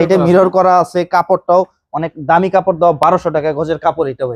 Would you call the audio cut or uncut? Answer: uncut